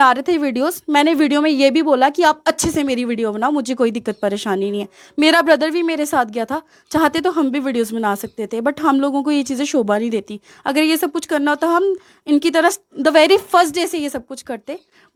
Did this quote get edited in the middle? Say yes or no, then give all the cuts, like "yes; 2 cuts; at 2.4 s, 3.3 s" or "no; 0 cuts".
no; 0 cuts